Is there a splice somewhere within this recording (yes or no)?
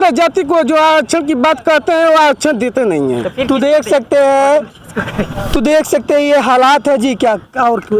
no